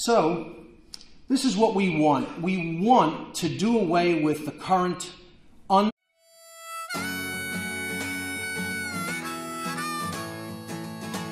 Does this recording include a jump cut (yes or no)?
no